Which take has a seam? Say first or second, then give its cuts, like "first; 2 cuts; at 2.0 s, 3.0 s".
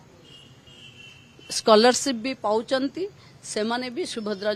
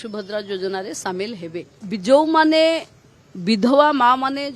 second; 1 cut; at 1.7 s